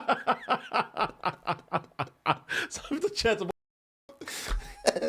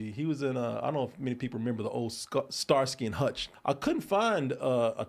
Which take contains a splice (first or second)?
second